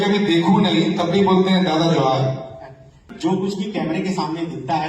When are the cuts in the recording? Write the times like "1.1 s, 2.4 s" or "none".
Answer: 2.9 s

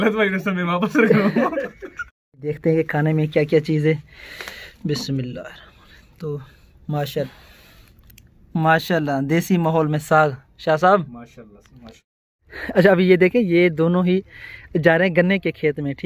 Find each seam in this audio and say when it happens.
2.5 s, 7.3 s, 12.4 s

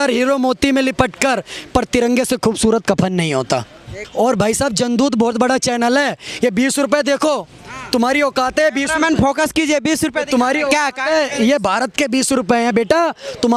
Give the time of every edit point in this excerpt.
4.0 s

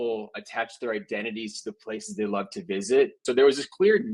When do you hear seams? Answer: 3.2 s

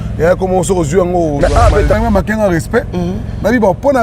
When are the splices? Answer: 1.9 s

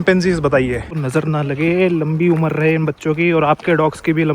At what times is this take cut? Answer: 1.0 s

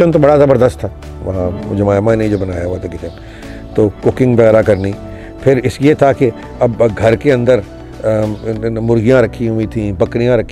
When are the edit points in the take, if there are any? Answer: none

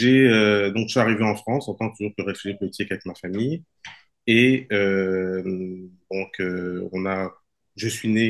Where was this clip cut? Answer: none

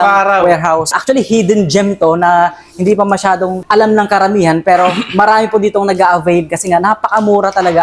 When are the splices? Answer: 1.0 s, 3.6 s

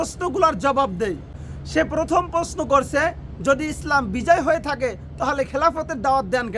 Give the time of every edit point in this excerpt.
none

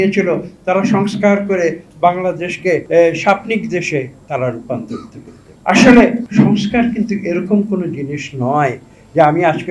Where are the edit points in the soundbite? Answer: 2.8 s, 5.6 s, 6.2 s

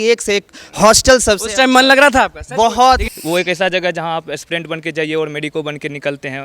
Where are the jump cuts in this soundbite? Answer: 3.1 s

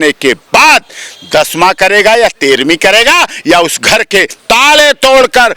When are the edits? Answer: 4.3 s

